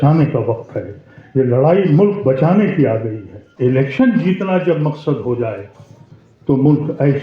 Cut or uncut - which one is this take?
cut